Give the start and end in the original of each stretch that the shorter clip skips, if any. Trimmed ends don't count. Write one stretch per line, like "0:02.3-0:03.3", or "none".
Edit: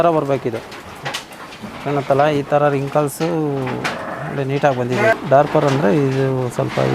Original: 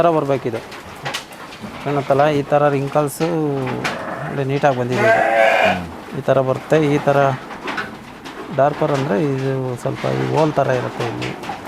0:05.1-0:08.4